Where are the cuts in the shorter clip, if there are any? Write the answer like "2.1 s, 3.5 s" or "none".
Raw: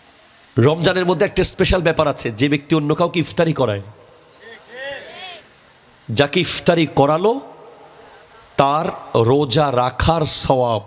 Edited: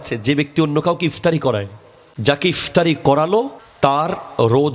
1.4 s, 3.6 s